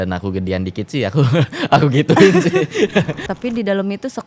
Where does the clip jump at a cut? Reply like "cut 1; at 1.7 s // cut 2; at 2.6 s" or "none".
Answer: cut 1; at 3.2 s